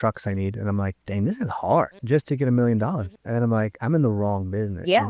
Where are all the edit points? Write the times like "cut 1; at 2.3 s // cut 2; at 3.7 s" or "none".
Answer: cut 1; at 1.0 s // cut 2; at 2.0 s // cut 3; at 3.1 s